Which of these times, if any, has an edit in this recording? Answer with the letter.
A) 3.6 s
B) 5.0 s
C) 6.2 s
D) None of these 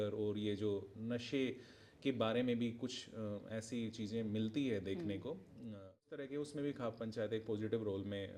C